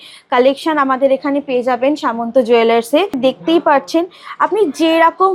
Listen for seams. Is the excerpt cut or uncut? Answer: cut